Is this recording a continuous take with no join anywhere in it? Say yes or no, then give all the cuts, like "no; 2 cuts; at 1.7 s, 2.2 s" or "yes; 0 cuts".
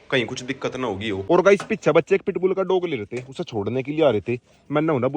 no; 1 cut; at 1.2 s